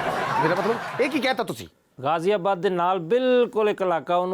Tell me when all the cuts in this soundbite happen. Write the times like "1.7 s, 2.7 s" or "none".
1.9 s